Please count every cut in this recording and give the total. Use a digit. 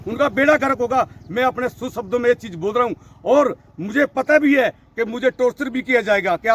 0